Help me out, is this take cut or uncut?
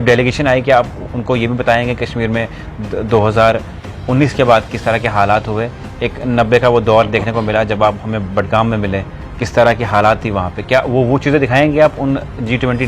uncut